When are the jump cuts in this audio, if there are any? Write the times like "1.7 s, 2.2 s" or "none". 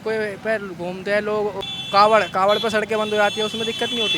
1.6 s